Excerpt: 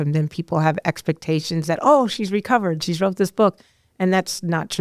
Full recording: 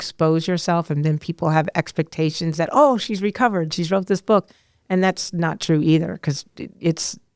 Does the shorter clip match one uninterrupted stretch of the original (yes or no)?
yes